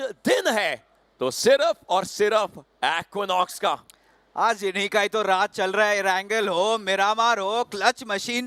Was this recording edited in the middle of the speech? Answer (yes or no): no